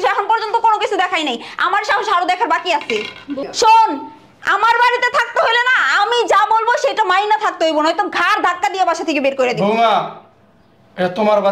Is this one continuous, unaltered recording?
no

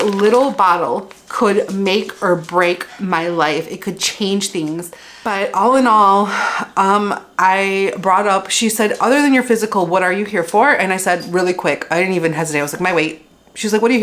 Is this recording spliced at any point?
yes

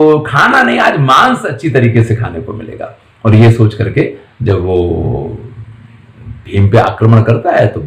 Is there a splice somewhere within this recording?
no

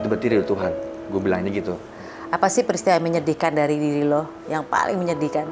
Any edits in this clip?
yes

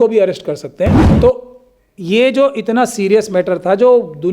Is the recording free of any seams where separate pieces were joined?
no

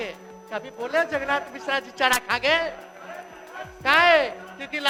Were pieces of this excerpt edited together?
no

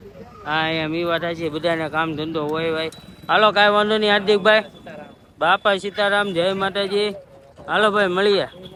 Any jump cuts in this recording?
no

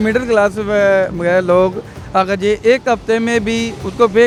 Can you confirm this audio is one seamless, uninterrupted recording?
yes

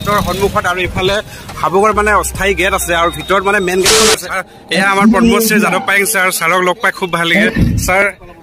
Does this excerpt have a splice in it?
yes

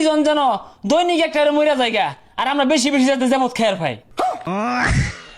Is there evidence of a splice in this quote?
yes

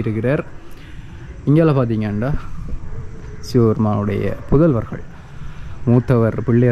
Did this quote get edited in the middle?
no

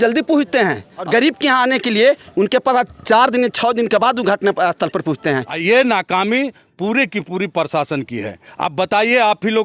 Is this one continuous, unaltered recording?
no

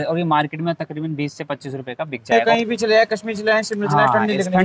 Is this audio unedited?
no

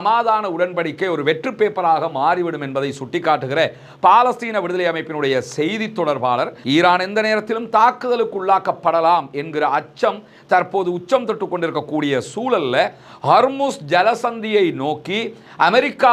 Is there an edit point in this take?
yes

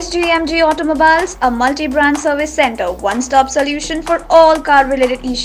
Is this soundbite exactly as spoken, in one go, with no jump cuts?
yes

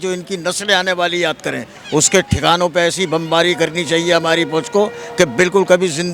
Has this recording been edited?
yes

